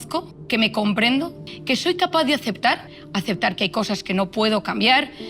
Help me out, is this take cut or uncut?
cut